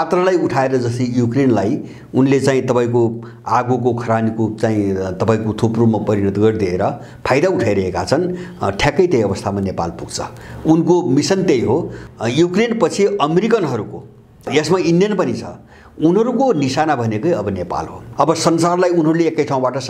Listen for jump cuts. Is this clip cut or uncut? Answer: cut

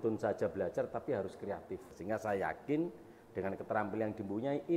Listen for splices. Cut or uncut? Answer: cut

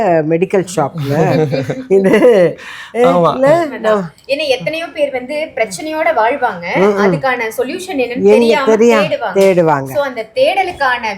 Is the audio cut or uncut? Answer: uncut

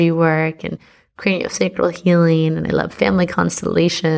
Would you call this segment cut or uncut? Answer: uncut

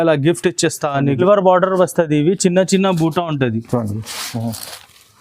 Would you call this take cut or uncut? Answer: cut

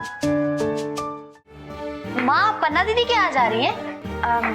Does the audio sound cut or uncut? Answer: cut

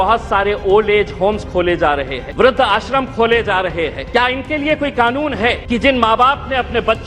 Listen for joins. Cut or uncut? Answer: cut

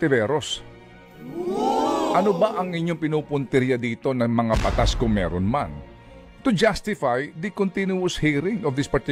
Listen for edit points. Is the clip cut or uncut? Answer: uncut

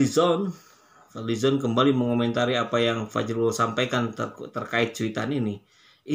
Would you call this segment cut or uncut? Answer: uncut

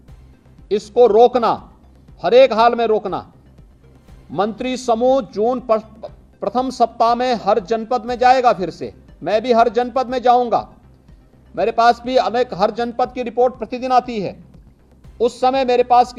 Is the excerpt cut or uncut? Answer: uncut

